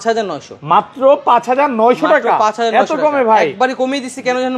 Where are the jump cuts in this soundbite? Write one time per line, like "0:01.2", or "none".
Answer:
none